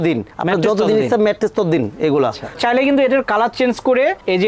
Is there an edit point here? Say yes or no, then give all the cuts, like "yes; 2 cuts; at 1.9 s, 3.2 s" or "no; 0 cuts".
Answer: yes; 1 cut; at 2.6 s